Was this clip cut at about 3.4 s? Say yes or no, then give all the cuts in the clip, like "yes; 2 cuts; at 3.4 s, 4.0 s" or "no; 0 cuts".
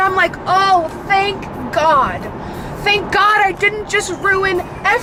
no; 0 cuts